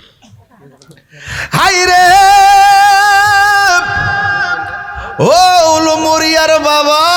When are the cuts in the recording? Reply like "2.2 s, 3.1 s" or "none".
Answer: none